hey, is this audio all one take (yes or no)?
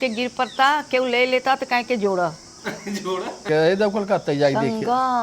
no